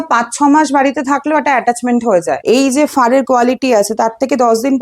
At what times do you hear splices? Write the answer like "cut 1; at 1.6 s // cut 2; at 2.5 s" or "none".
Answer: cut 1; at 2.4 s